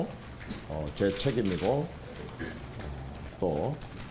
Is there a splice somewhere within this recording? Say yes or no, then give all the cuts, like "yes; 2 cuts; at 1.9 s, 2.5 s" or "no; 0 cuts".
no; 0 cuts